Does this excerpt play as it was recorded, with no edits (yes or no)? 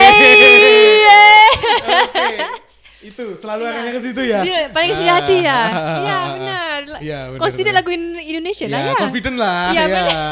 yes